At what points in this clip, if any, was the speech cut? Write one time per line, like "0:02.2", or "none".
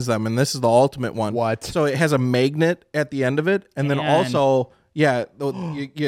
none